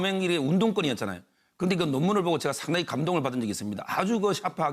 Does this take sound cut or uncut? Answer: cut